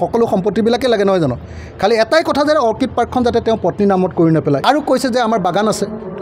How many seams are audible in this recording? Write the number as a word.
one